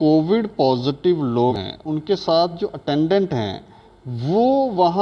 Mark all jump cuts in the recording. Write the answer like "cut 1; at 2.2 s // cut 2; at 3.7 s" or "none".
cut 1; at 1.6 s